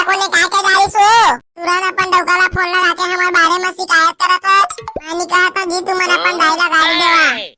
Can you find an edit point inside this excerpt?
no; 0 cuts

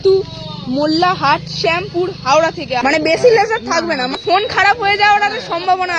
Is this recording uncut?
no; 2 cuts; at 2.8 s, 4.2 s

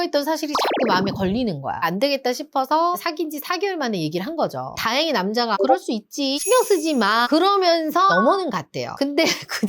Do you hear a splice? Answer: yes; 3 cuts; at 1.8 s, 4.7 s, 8.1 s

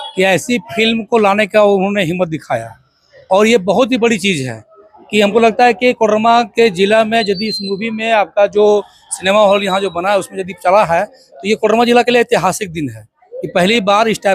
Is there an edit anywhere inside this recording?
no; 0 cuts

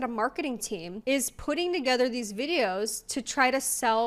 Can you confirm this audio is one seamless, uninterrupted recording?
no; 1 cut; at 0.9 s

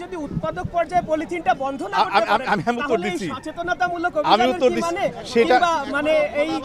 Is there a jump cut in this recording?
no; 0 cuts

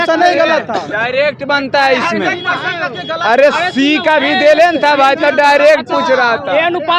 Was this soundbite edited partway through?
no; 0 cuts

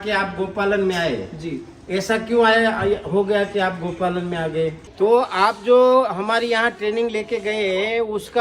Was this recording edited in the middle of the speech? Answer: yes; 1 cut; at 4.8 s

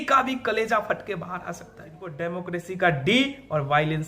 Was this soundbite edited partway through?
yes; 1 cut; at 2.2 s

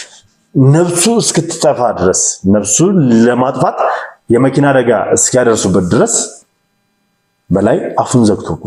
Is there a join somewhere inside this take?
no; 0 cuts

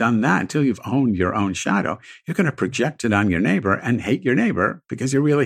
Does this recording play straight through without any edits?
yes; 0 cuts

